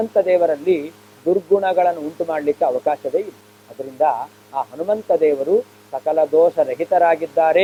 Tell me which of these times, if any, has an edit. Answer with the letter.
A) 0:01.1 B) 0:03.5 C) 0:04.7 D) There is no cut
D